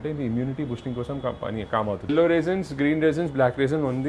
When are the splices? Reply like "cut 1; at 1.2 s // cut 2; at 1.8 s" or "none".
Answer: cut 1; at 2.0 s